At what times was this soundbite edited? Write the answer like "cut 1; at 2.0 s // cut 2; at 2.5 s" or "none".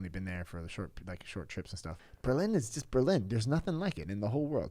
cut 1; at 2.1 s